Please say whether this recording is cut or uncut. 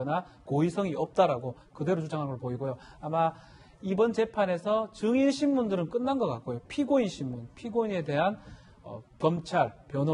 cut